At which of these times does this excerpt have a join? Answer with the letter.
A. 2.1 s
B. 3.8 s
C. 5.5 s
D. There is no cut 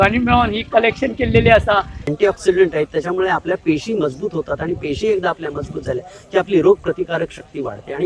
A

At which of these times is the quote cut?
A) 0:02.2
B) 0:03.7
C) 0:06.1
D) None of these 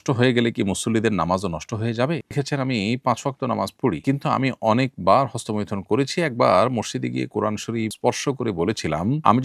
A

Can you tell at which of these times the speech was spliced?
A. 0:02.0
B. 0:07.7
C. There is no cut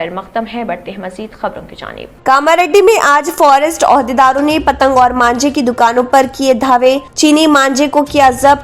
A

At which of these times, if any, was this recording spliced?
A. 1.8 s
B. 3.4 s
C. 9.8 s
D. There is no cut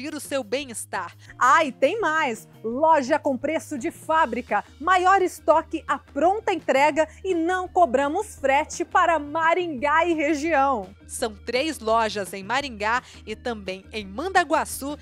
D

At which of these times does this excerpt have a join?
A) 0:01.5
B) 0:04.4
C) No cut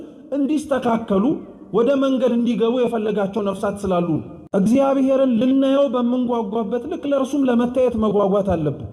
B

